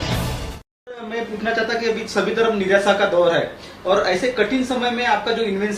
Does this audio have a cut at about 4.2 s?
no; 1 cut; at 1.1 s

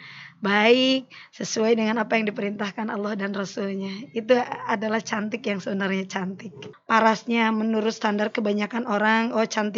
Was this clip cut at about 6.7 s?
yes; 1 cut; at 6.7 s

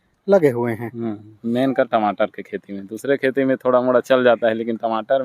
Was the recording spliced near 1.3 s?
yes; 1 cut; at 1.3 s

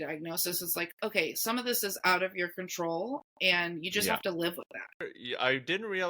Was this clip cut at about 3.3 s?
no; 1 cut; at 5.1 s

